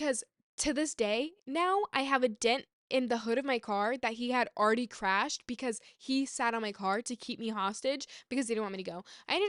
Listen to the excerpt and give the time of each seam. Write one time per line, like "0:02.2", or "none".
none